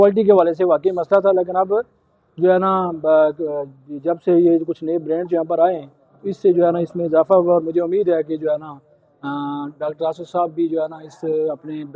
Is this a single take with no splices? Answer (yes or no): yes